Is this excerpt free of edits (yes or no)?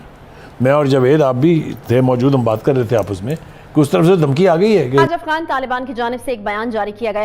no